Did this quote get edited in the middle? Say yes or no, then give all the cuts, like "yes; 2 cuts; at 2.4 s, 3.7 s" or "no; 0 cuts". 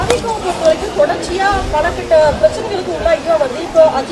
no; 0 cuts